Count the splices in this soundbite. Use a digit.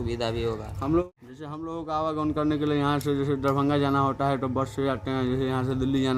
1